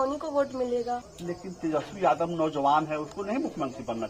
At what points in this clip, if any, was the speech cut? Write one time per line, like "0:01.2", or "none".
0:01.1